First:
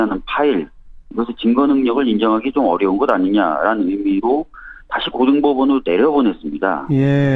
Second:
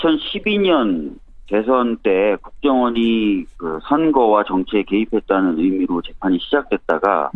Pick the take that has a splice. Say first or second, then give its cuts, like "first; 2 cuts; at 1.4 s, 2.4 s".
second; 1 cut; at 6.3 s